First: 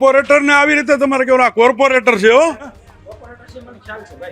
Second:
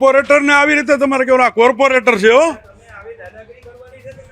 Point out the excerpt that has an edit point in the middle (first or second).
first